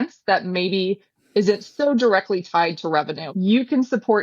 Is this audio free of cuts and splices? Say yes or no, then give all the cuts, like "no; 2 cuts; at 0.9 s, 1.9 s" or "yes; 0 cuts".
no; 1 cut; at 3.3 s